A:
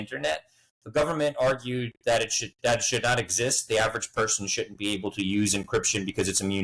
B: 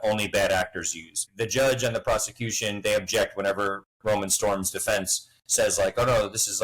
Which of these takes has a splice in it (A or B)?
B